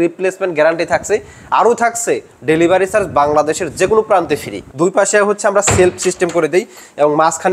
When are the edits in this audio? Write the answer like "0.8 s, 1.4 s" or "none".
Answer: 4.6 s